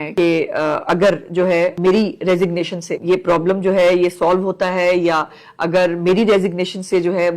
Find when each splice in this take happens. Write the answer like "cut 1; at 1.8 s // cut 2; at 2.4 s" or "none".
cut 1; at 1.8 s // cut 2; at 2.9 s